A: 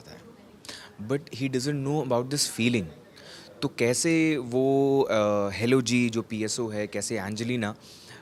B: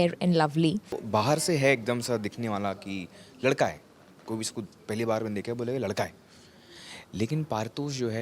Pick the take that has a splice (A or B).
B